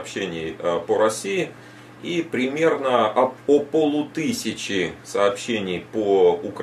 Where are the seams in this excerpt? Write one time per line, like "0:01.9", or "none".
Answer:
none